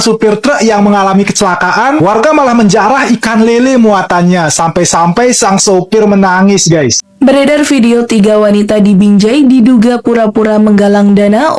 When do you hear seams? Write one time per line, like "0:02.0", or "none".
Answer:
0:07.1